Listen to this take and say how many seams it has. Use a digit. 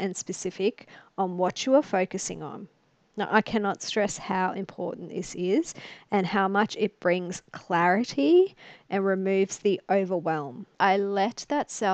1